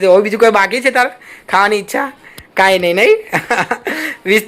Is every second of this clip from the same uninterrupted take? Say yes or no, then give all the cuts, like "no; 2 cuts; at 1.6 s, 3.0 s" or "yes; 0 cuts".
yes; 0 cuts